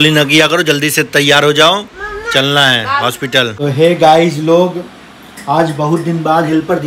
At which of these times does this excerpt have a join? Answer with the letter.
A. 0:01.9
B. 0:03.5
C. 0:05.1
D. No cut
B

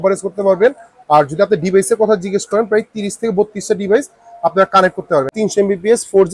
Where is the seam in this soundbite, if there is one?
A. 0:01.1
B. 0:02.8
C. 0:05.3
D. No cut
C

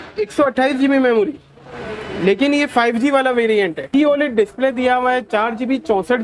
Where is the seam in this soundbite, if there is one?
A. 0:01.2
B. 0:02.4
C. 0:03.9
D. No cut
C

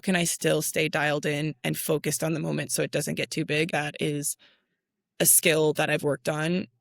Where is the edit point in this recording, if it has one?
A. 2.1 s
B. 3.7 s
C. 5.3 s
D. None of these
B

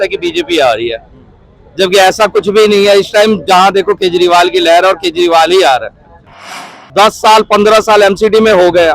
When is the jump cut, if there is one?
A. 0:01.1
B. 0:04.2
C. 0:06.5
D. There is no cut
C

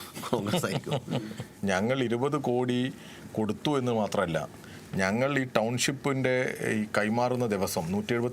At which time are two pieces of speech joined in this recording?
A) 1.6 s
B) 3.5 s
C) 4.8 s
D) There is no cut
A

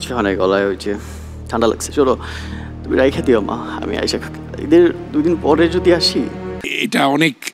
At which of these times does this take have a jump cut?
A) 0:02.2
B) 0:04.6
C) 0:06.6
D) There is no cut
C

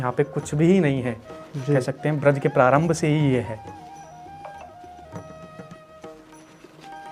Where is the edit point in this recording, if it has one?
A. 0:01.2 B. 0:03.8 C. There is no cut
C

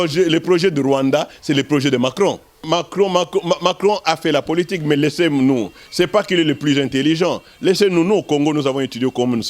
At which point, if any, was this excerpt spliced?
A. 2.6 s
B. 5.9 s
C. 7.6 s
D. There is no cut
A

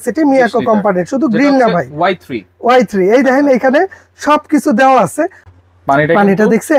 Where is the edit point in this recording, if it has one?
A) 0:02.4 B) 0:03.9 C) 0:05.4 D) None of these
C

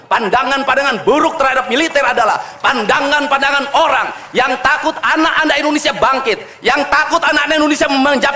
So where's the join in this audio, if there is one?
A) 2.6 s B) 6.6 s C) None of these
C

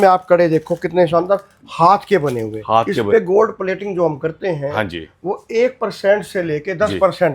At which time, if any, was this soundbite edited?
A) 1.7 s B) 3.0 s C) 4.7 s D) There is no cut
B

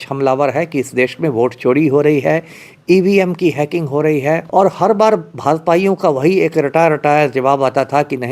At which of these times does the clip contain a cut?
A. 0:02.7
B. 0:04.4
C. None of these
B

